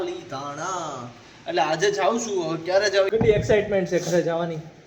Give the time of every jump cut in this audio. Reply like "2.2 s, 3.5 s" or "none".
3.1 s